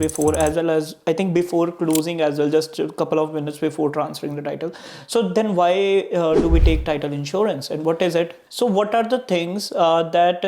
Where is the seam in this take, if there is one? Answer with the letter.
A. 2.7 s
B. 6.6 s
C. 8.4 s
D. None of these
C